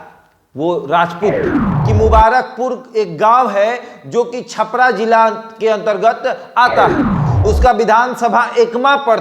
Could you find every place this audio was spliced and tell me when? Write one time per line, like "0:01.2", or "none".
0:01.8
0:07.3